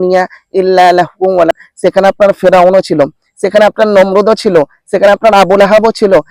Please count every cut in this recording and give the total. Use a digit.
1